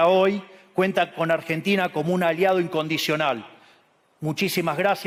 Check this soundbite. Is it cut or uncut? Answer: uncut